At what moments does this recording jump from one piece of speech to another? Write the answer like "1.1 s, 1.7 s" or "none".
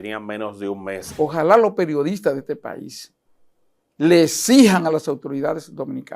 1.1 s